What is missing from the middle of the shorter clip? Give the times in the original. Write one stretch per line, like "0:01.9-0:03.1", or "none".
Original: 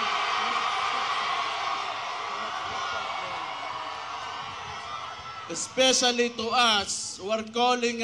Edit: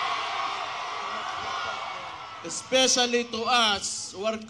0:03.5-0:05.3